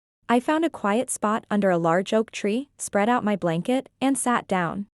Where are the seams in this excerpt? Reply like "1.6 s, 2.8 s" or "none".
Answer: 2.8 s